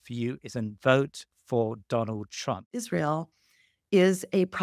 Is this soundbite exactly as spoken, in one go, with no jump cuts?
no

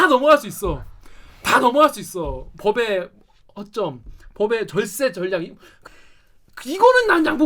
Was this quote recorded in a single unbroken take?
no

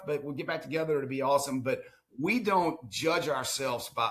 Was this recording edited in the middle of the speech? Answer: no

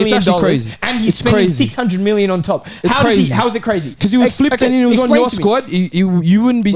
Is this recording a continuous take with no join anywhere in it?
yes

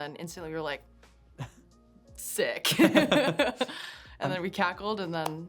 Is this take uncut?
yes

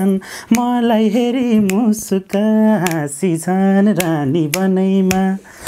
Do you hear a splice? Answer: no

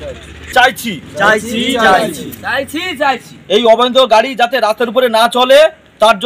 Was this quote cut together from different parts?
no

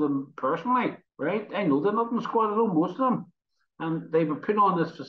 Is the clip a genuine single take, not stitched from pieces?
no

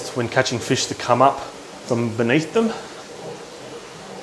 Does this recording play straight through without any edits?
yes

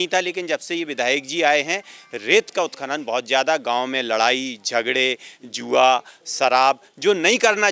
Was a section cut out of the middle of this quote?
no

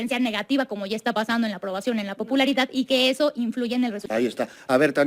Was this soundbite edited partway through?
yes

